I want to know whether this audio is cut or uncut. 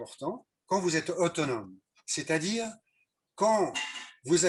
uncut